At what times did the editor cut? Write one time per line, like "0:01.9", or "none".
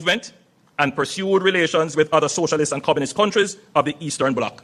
none